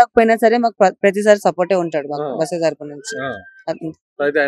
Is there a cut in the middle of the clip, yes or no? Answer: no